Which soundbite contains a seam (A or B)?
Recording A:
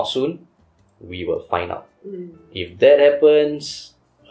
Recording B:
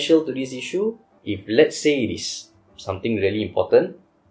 B